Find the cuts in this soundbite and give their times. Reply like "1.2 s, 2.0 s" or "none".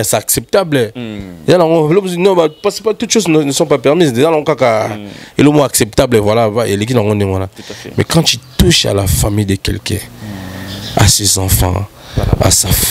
none